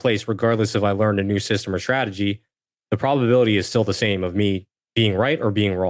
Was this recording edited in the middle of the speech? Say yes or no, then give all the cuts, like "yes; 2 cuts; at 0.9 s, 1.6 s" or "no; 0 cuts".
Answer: yes; 1 cut; at 4.8 s